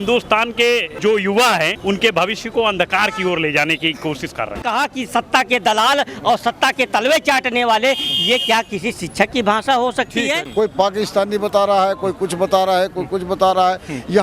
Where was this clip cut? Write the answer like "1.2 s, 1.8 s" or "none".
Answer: 1.0 s, 4.6 s, 10.4 s

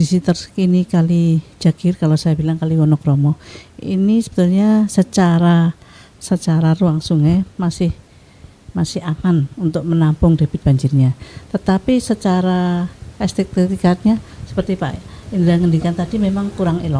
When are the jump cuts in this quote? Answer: none

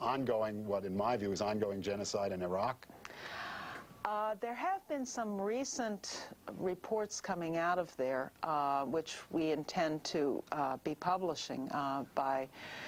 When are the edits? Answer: none

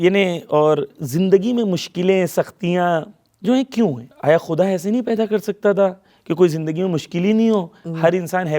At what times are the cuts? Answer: 4.1 s

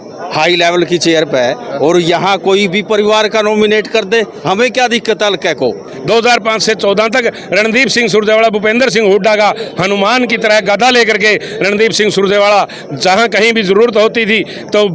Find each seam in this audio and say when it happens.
5.9 s

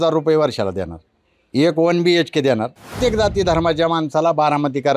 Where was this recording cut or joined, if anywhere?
2.9 s

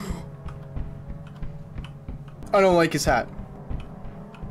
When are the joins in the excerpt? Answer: 2.4 s

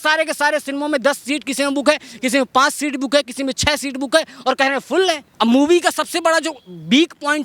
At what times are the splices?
5.3 s

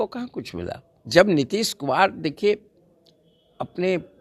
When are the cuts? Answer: 0.9 s

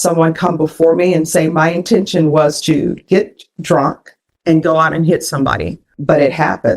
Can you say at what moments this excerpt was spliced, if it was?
5.8 s

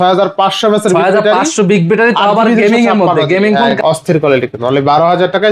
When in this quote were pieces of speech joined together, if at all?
3.7 s

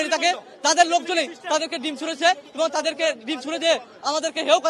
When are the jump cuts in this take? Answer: none

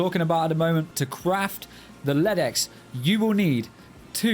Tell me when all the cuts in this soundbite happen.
1.0 s

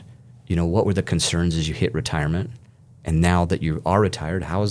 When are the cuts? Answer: none

